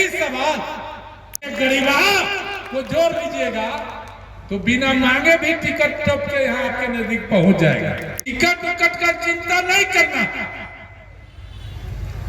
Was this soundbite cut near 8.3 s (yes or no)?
yes